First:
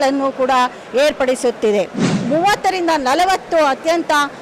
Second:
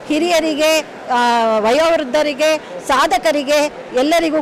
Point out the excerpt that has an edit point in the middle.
first; 1 cut; at 2.1 s

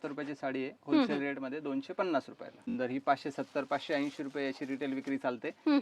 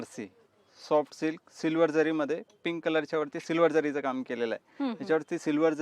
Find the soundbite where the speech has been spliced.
first; 1 cut; at 2.8 s

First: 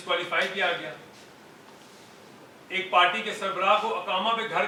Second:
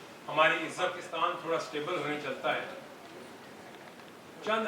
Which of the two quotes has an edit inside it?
second; 1 cut; at 1.0 s

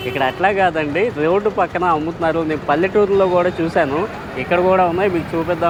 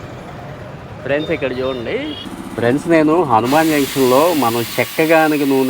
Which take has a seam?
second; 1 cut; at 2.3 s

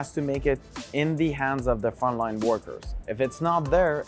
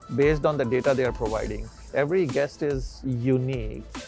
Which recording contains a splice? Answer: second; 1 cut; at 1.8 s

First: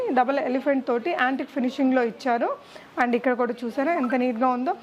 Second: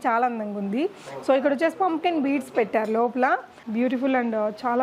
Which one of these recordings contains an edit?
second; 1 cut; at 3.6 s

